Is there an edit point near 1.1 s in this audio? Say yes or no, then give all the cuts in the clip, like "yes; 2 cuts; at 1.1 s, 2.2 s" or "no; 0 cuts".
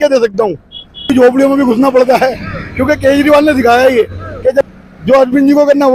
yes; 2 cuts; at 1.1 s, 4.7 s